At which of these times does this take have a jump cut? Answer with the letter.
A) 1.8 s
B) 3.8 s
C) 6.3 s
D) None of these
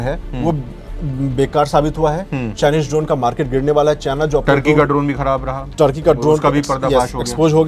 D